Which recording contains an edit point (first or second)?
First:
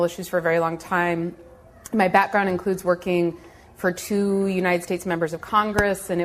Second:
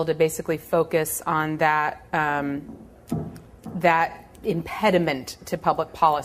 second